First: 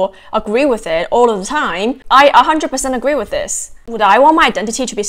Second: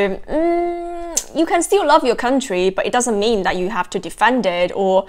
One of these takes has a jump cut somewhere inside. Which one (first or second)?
first